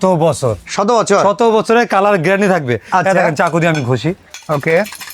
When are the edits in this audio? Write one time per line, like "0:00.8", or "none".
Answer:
none